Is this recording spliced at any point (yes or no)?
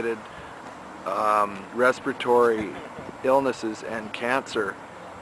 no